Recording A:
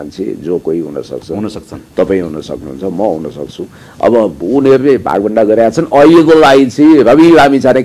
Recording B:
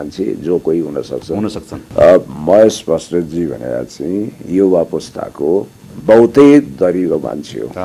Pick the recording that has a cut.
B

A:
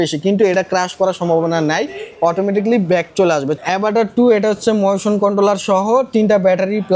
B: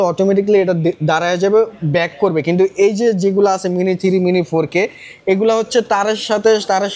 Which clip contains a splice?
A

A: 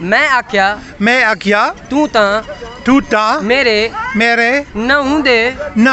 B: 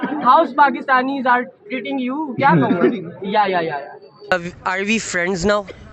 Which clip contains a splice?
B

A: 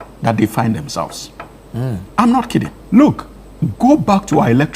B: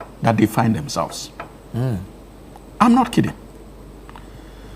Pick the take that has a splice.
A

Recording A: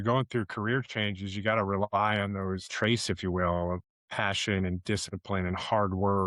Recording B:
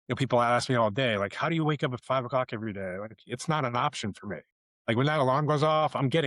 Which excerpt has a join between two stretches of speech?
A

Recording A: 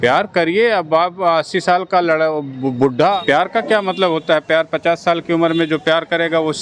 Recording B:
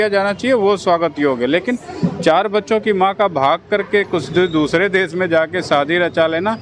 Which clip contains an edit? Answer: A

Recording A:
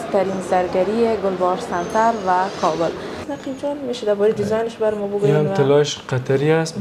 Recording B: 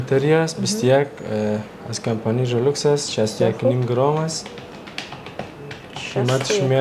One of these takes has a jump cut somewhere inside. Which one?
A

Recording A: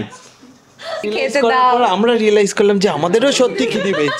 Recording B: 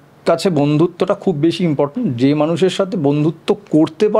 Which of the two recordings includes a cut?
A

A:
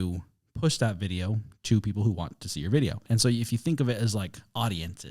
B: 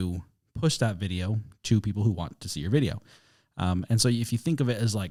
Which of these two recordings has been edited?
A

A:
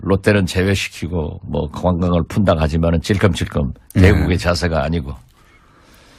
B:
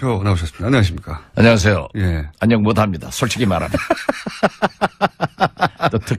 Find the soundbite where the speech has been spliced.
A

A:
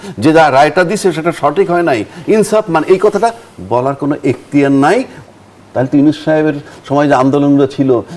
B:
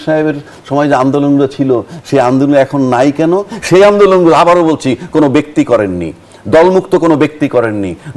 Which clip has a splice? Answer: A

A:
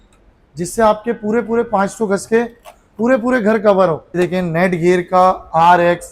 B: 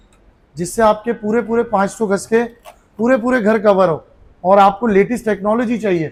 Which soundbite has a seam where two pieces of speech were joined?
A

